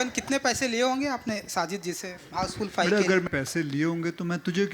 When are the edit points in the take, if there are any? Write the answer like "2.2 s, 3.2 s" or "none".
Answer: 3.3 s